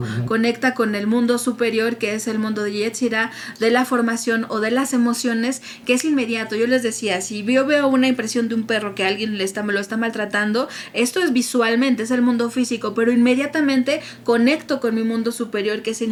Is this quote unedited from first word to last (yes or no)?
yes